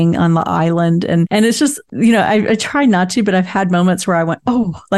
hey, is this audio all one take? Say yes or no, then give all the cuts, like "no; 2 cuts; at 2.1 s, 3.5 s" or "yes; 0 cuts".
no; 1 cut; at 1.6 s